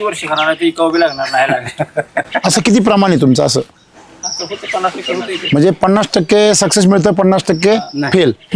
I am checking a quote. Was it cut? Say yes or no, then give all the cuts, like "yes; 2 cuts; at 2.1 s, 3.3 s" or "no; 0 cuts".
no; 0 cuts